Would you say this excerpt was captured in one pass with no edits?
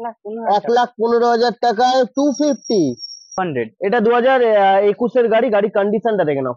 no; 1 cut; at 3.4 s

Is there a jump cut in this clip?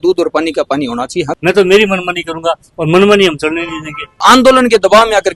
yes; 2 cuts; at 1.3 s, 4.2 s

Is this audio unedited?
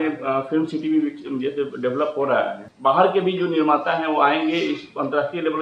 no; 1 cut; at 2.6 s

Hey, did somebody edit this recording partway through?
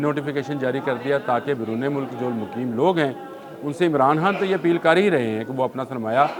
no; 0 cuts

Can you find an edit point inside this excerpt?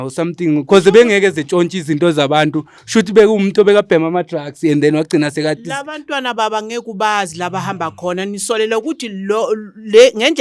no; 0 cuts

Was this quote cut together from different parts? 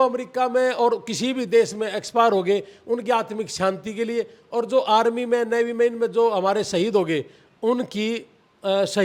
no; 0 cuts

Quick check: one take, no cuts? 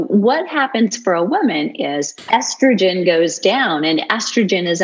no; 1 cut; at 2.1 s

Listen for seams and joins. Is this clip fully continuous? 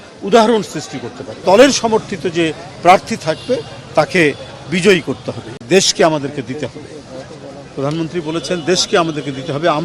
no; 2 cuts; at 1.4 s, 5.6 s

